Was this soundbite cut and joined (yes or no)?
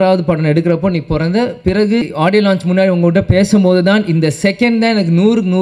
yes